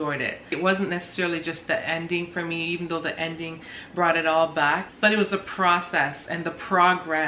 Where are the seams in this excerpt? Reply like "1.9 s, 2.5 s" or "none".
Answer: 4.9 s

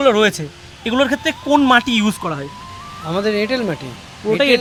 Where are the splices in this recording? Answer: none

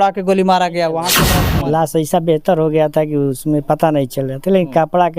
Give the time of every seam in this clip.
1.2 s

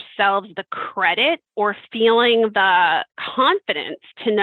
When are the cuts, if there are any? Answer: 3.2 s

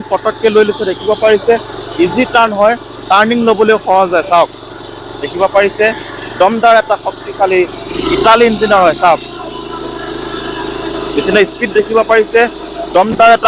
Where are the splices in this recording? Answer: none

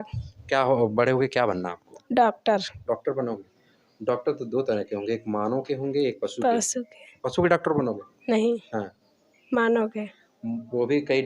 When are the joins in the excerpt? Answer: none

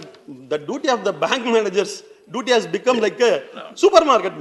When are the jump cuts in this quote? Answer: none

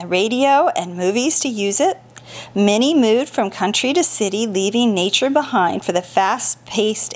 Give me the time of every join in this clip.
none

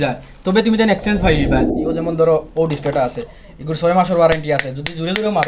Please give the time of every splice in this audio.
1.8 s

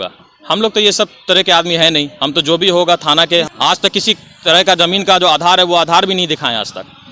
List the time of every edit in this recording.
3.5 s

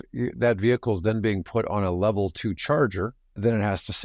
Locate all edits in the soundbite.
none

